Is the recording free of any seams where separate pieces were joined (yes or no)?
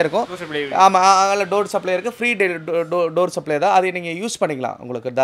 yes